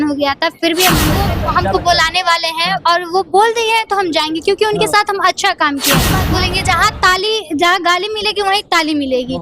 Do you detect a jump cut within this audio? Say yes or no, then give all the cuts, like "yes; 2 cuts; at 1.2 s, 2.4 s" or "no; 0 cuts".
yes; 2 cuts; at 1.2 s, 6.2 s